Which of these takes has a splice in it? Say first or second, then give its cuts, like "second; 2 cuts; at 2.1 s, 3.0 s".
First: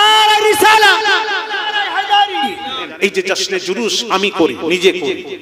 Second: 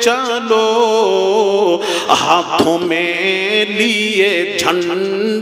first; 1 cut; at 2.8 s